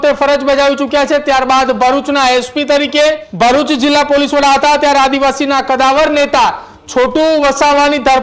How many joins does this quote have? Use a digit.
1